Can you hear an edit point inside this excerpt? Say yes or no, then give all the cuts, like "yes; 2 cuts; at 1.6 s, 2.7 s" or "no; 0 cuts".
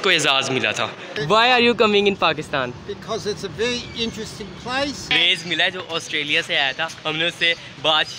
yes; 2 cuts; at 1.2 s, 5.1 s